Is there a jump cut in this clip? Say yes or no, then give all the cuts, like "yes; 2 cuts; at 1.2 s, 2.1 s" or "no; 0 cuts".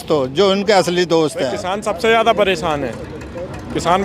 yes; 1 cut; at 1.7 s